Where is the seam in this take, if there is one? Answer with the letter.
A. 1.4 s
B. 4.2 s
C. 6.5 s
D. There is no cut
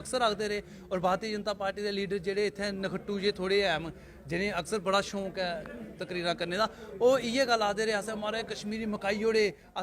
D